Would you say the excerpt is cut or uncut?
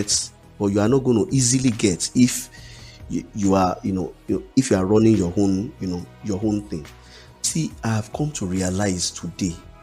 cut